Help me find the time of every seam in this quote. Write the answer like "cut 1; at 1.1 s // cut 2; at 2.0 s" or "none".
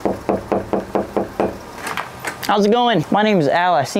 cut 1; at 1.7 s // cut 2; at 3.1 s